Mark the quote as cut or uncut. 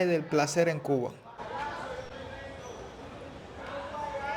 uncut